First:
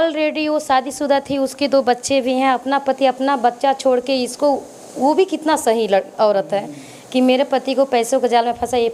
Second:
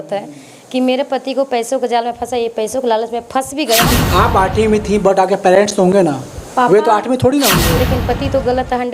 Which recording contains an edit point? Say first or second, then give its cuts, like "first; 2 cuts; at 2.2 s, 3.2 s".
second; 2 cuts; at 3.9 s, 7.8 s